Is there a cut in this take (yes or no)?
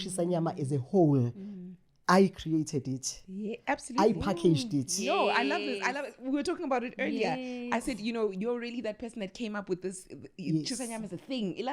no